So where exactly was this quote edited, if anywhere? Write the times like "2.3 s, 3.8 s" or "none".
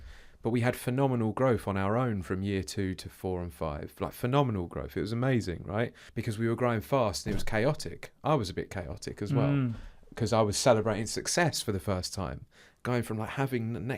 6.1 s